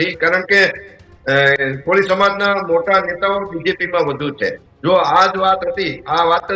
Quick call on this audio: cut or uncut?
cut